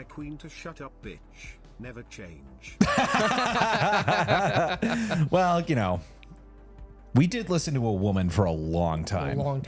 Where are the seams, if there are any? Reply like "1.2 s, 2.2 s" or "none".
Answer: none